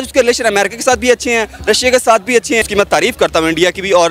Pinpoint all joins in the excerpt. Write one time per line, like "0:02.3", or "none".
0:02.7